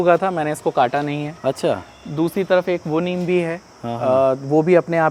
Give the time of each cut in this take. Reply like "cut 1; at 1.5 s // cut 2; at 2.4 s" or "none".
none